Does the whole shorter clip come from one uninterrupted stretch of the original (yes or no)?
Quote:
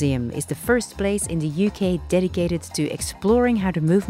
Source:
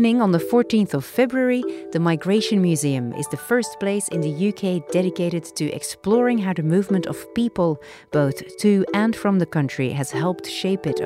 yes